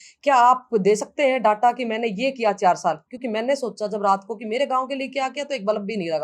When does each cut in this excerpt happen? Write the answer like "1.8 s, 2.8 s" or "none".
none